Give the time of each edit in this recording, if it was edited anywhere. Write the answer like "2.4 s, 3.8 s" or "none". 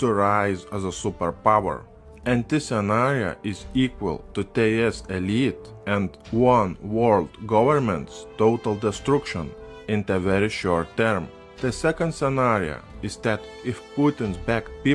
none